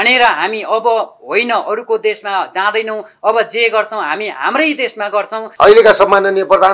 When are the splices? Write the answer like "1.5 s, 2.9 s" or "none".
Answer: 5.4 s